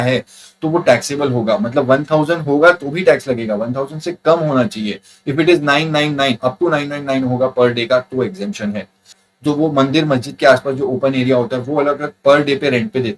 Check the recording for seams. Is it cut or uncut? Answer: cut